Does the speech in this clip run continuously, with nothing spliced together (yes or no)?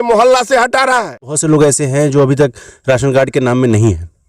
no